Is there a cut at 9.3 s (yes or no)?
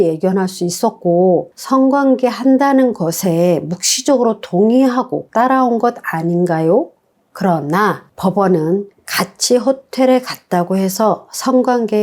no